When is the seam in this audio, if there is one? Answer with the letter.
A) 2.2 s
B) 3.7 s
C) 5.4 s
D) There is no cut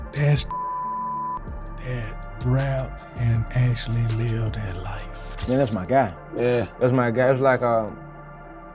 C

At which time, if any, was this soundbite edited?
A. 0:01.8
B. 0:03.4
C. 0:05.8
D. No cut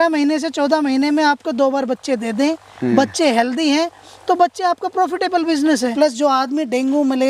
C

